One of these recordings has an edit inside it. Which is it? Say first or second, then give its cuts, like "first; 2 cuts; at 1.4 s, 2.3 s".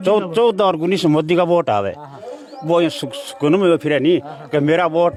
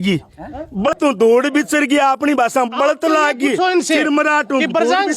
second; 1 cut; at 0.9 s